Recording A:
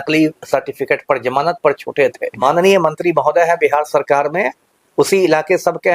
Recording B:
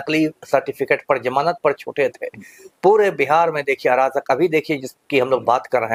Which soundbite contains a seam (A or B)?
A